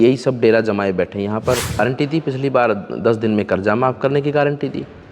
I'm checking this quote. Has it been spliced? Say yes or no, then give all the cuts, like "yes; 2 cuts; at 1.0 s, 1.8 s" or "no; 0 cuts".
yes; 1 cut; at 1.8 s